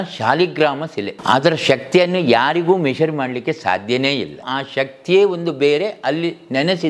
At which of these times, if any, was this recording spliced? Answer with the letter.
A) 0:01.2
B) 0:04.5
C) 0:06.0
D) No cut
B